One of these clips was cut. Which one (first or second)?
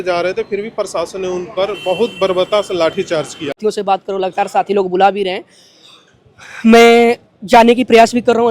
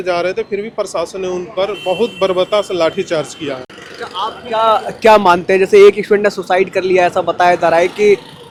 first